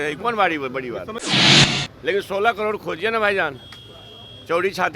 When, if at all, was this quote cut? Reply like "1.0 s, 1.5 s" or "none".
1.5 s